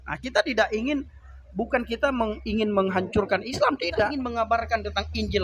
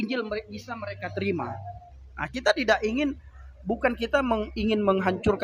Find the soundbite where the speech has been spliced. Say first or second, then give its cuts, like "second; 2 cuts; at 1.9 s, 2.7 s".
first; 1 cut; at 4.3 s